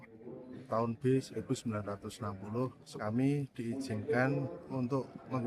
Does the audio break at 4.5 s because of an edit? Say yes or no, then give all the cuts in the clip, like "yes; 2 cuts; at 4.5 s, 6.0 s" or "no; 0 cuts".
no; 1 cut; at 2.9 s